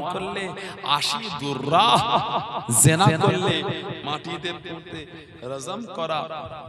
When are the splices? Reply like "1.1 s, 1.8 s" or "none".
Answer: none